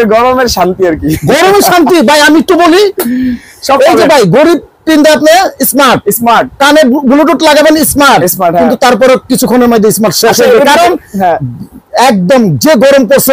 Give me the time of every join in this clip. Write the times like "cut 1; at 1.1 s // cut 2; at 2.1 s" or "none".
none

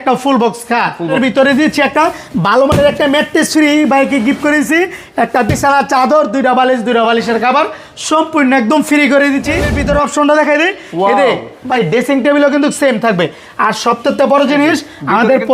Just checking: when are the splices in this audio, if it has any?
cut 1; at 1.1 s // cut 2; at 9.7 s

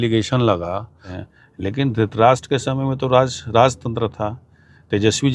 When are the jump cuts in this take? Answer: cut 1; at 1.2 s

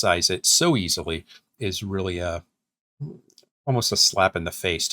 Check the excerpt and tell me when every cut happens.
cut 1; at 1.5 s

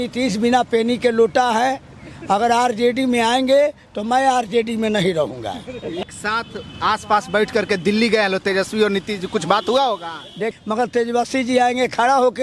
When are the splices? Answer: cut 1; at 6.0 s // cut 2; at 10.4 s

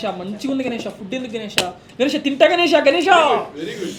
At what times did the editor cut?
none

